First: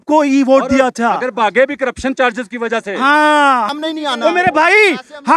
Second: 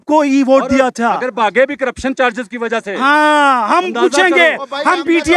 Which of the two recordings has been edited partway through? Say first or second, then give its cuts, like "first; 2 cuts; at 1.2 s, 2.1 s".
first; 1 cut; at 3.6 s